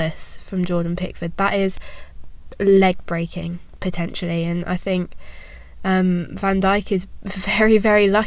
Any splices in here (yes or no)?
no